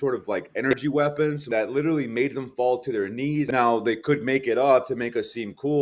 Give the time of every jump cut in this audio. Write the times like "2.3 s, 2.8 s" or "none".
1.2 s, 3.5 s